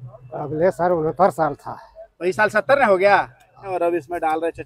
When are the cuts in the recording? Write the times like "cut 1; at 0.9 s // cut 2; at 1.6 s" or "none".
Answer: cut 1; at 3.7 s